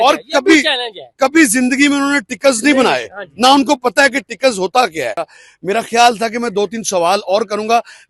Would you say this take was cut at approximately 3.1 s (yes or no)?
no